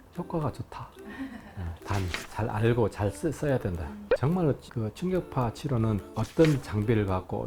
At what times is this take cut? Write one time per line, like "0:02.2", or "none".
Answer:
0:01.8